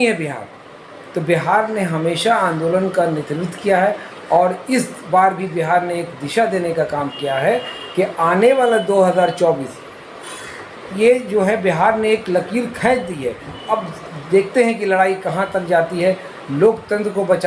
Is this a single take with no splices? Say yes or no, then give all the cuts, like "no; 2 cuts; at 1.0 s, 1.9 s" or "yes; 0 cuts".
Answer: yes; 0 cuts